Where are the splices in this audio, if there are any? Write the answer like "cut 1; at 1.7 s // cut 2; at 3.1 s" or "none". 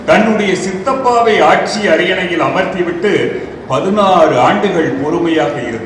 none